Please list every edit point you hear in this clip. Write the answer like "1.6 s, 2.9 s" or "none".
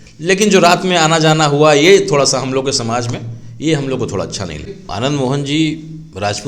4.7 s